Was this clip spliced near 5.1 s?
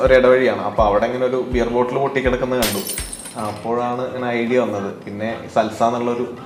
no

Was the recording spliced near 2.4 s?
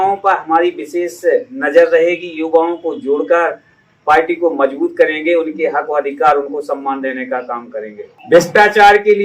no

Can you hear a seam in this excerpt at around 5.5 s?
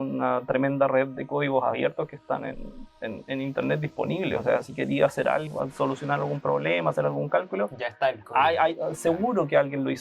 yes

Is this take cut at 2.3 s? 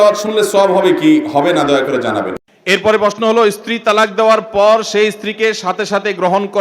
yes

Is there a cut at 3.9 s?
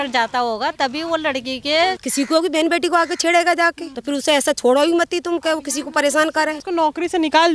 yes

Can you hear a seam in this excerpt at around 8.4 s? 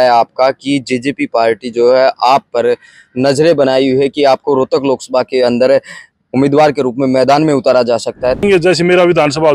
yes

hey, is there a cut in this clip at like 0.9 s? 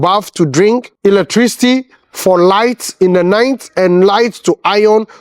yes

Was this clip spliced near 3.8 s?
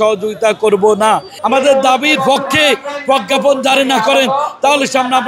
no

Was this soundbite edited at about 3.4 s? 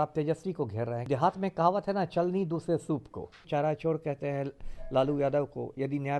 yes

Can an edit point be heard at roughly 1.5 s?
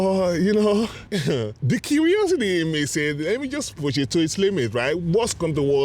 yes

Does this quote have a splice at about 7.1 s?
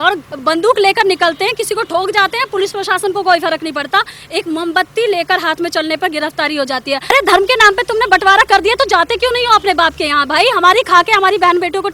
yes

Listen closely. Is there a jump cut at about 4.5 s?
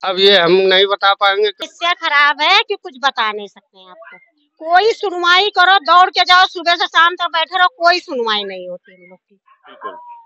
no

